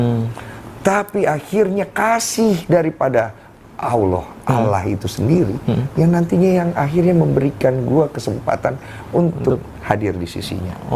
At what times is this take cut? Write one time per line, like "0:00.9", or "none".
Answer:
none